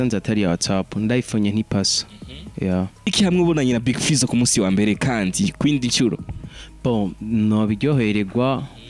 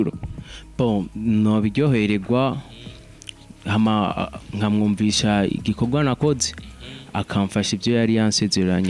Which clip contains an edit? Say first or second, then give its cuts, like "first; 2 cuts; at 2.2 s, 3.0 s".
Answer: first; 1 cut; at 3.1 s